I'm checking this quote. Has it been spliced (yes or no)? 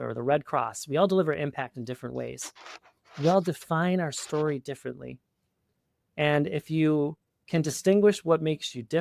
no